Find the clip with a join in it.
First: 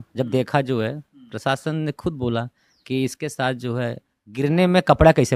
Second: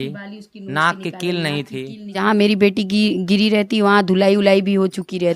second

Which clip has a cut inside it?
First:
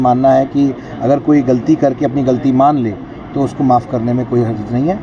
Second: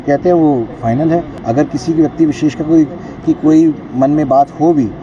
second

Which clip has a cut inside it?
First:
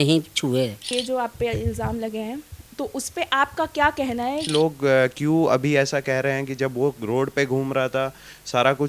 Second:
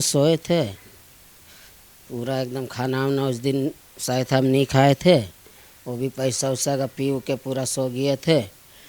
first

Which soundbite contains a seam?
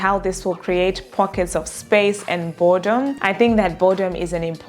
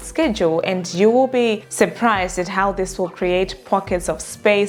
first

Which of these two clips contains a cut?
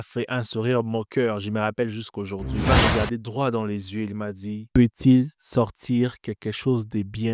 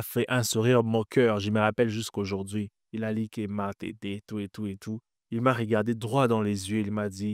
first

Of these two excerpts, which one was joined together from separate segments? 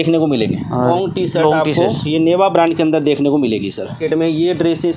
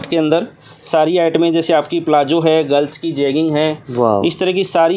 first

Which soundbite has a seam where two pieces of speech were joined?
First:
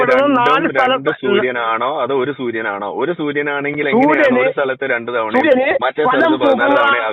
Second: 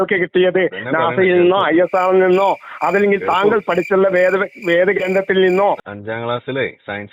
second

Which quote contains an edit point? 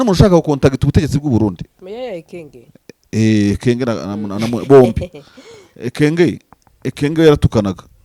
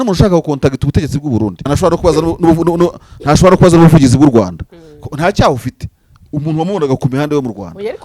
second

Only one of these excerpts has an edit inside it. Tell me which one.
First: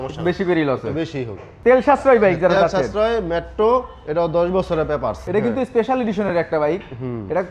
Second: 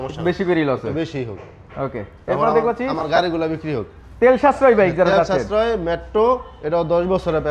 first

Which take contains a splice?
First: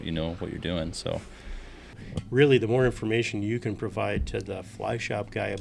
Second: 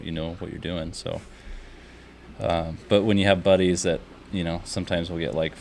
first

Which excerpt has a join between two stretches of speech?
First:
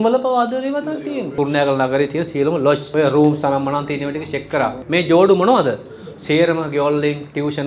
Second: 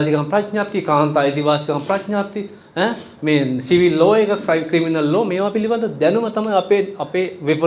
first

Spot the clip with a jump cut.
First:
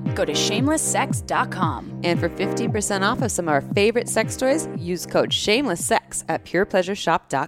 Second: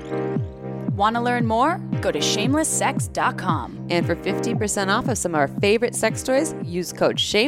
second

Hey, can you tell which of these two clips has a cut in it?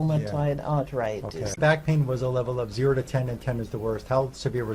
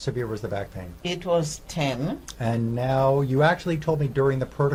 first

